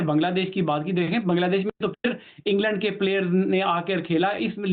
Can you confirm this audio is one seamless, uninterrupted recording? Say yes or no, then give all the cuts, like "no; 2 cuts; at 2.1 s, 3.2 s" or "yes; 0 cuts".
yes; 0 cuts